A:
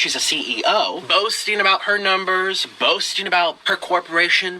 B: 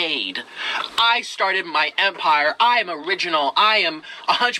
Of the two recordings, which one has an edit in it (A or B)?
A